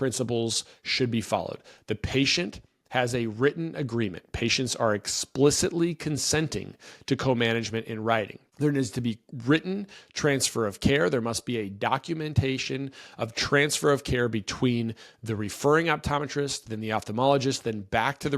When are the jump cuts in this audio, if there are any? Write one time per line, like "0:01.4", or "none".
0:08.4